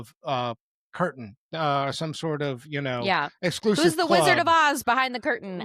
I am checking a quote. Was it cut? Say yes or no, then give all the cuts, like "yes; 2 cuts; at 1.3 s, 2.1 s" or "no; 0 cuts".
no; 0 cuts